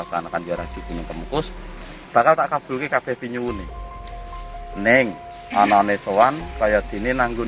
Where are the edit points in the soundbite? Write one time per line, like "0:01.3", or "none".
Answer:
none